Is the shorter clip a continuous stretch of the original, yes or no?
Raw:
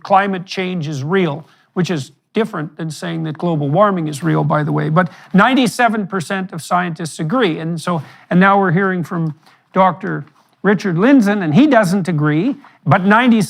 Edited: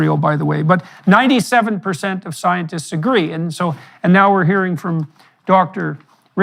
yes